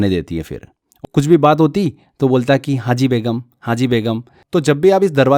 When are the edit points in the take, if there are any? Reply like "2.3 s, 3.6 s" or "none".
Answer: 1.0 s, 4.4 s